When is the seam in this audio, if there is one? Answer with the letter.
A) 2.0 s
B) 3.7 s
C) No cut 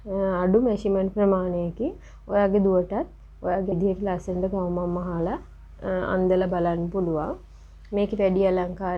B